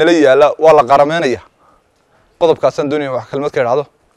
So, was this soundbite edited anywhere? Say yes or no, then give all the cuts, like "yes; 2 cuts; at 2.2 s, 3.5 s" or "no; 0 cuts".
no; 0 cuts